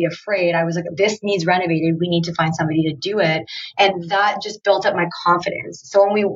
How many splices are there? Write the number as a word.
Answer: zero